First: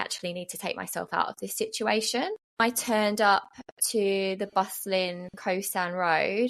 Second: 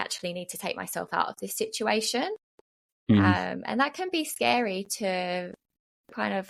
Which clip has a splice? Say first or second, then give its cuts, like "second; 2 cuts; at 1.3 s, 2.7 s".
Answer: first; 1 cut; at 2.6 s